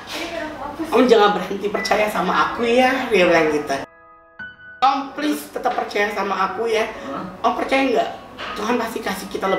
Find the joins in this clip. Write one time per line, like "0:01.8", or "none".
none